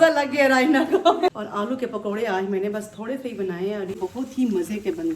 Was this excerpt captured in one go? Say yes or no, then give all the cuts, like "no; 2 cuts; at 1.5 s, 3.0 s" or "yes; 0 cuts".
no; 2 cuts; at 1.3 s, 4.0 s